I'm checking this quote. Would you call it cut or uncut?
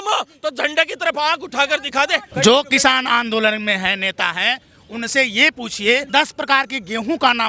cut